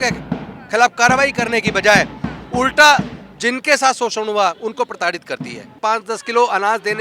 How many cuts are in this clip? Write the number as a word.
one